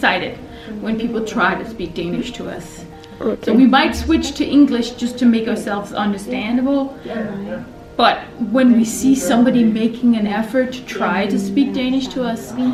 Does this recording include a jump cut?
no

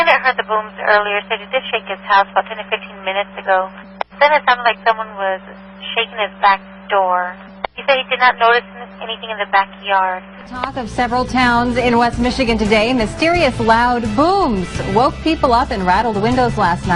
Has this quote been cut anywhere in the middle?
yes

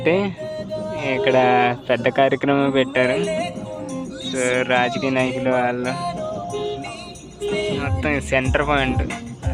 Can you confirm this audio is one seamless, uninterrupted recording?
yes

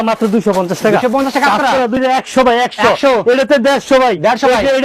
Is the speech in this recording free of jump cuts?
no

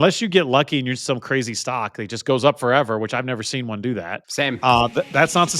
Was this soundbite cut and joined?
yes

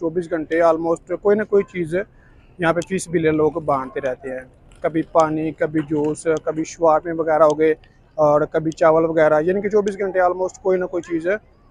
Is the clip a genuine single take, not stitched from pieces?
yes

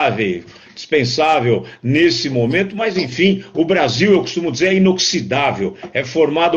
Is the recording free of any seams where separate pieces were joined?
no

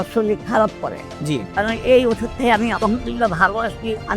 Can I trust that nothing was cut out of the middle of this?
no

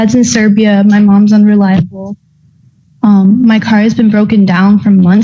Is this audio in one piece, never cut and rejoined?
yes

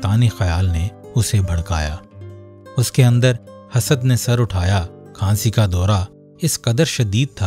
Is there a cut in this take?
yes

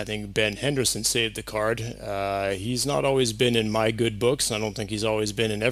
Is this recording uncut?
yes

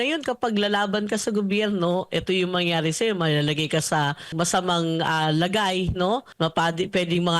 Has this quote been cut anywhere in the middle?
yes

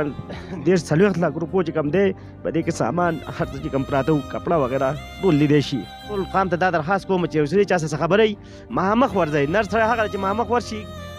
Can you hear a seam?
yes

